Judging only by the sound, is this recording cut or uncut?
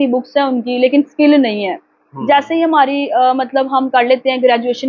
uncut